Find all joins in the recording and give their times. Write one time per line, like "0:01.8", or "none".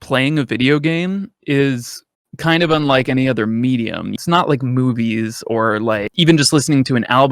0:04.1
0:06.1